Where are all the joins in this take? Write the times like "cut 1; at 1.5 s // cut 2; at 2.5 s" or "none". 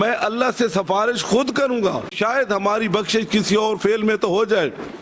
cut 1; at 2.1 s